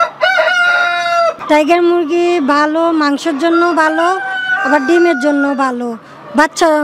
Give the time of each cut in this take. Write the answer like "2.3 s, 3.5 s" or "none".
1.4 s